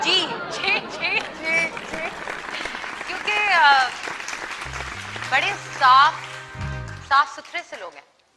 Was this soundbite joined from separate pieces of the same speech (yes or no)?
no